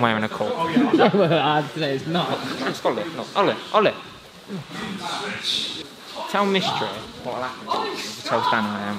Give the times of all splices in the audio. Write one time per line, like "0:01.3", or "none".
0:02.6
0:05.8